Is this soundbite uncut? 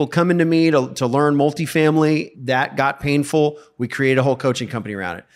no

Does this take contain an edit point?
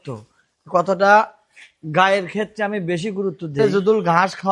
yes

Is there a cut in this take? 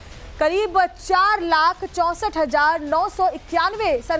yes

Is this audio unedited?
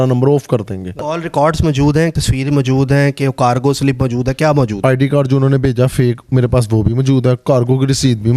no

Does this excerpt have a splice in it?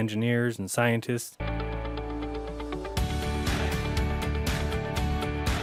no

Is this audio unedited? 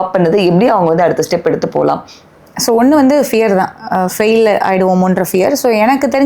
yes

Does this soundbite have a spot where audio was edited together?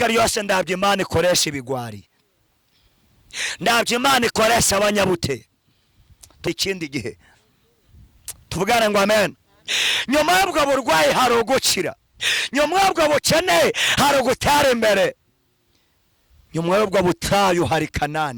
yes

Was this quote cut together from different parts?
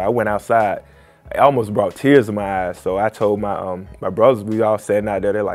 no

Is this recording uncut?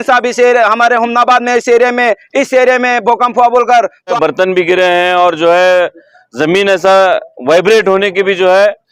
no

